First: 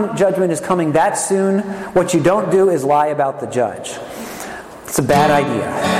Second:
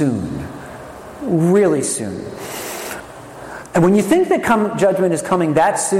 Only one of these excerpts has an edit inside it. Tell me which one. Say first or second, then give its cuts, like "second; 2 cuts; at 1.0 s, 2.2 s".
second; 1 cut; at 3.0 s